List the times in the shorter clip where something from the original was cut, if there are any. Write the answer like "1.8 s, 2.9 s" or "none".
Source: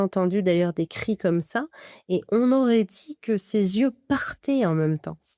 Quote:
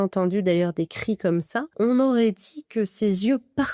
1.7 s